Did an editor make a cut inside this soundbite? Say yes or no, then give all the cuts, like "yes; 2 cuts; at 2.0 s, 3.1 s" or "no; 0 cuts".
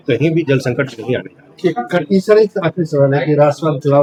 no; 0 cuts